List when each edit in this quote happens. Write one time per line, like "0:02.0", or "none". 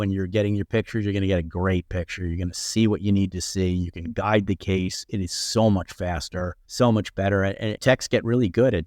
0:06.6
0:07.8